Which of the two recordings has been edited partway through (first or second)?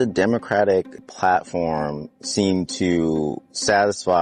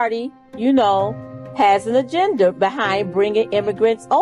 first